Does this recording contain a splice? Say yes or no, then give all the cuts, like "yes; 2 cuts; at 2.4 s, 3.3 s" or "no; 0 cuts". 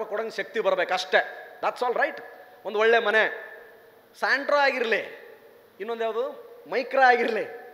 no; 0 cuts